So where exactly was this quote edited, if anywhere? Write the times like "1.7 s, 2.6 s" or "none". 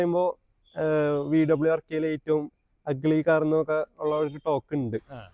none